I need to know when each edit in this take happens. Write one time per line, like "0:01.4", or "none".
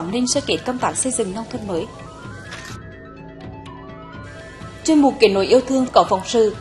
none